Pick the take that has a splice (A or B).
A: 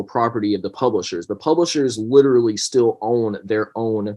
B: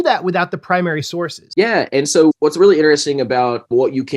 B